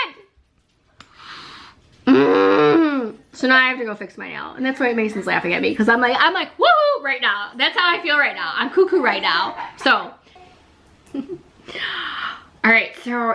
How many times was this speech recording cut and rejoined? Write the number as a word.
one